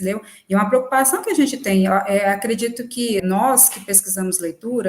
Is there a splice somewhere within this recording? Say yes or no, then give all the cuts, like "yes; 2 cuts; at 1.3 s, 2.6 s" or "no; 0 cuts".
yes; 1 cut; at 3.2 s